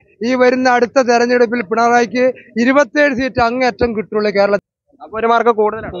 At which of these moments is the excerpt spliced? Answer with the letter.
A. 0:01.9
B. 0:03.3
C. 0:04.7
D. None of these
C